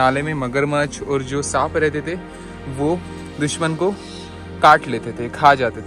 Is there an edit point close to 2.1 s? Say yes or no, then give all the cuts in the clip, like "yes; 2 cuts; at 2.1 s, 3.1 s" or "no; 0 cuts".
no; 0 cuts